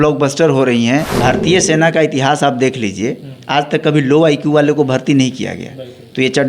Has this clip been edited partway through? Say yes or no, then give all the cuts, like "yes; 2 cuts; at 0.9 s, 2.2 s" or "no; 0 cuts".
yes; 1 cut; at 1.1 s